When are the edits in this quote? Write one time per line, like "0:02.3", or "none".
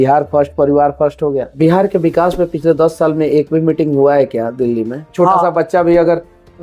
0:01.5
0:05.1